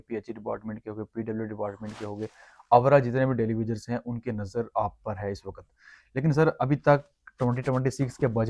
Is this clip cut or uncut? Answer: uncut